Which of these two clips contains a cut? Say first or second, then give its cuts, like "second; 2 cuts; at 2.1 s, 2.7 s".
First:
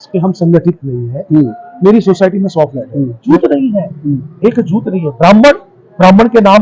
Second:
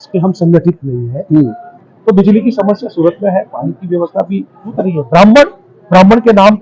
second; 2 cuts; at 1.6 s, 4.7 s